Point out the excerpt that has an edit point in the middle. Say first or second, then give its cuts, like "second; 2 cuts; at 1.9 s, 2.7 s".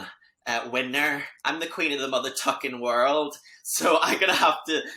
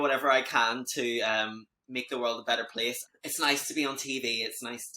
second; 1 cut; at 3.0 s